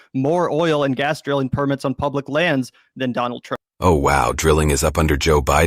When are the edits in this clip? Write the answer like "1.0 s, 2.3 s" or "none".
3.6 s

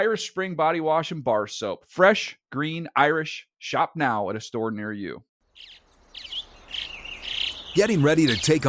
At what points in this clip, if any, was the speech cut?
5.3 s

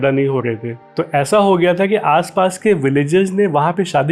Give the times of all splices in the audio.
none

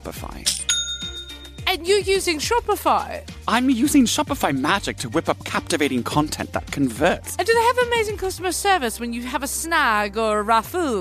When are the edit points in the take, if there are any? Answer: 1.4 s, 7.3 s

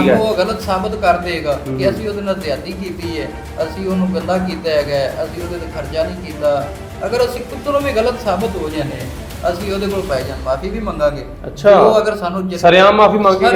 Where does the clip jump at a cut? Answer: none

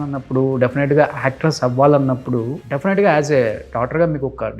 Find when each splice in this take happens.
2.6 s

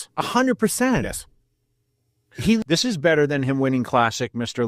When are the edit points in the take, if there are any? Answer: 2.6 s

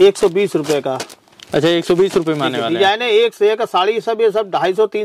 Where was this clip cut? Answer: none

